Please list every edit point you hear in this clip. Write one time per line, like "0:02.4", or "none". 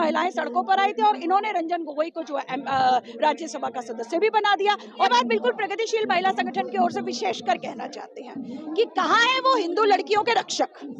0:05.1